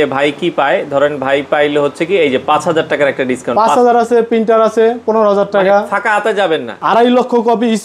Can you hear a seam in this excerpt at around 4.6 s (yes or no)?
no